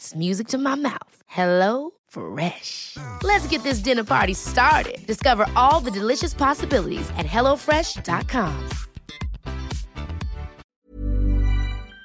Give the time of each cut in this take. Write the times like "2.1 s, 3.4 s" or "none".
10.6 s